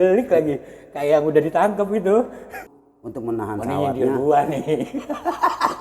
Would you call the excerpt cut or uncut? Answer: cut